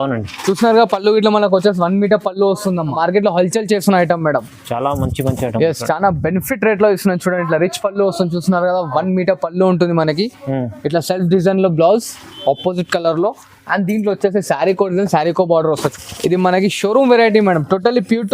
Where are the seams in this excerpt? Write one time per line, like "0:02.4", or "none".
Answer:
0:02.9
0:15.9